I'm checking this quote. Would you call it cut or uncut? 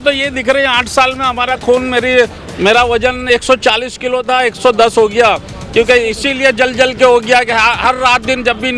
uncut